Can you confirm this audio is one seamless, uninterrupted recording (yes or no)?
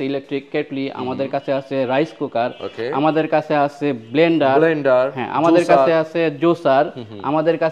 yes